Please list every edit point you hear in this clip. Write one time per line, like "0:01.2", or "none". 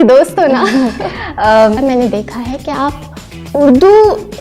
0:01.8